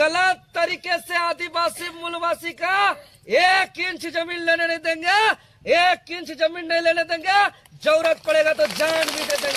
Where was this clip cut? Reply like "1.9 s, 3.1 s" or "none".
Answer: none